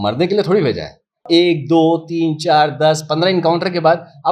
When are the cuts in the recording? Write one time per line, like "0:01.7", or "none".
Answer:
0:01.2